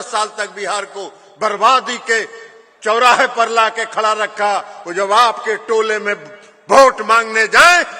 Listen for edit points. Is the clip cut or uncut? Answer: uncut